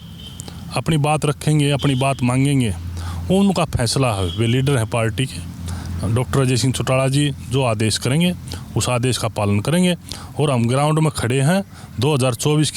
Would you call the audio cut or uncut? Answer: uncut